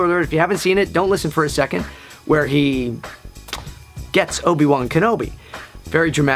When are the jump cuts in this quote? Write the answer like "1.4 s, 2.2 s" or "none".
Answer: 5.3 s